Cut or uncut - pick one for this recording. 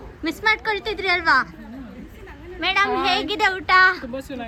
uncut